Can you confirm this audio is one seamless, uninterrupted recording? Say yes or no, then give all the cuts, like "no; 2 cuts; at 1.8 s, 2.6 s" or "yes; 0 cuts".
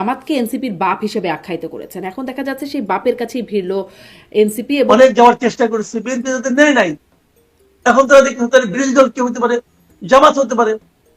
no; 1 cut; at 4.9 s